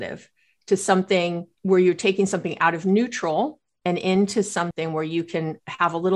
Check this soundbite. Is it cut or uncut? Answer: cut